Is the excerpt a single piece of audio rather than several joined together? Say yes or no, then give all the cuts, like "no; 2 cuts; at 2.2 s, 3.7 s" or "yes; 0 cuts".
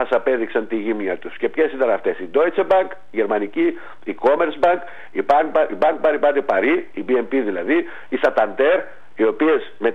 no; 2 cuts; at 6.9 s, 9.0 s